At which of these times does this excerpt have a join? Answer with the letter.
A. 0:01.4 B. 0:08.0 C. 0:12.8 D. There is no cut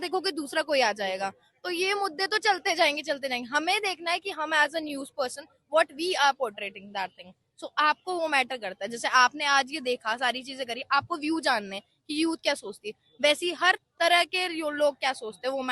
D